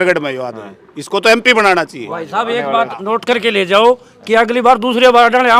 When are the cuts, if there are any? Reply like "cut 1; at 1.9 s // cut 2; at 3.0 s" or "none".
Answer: none